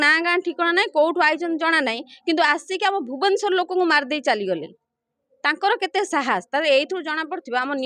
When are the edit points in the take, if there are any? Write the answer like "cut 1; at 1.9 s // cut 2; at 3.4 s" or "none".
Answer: none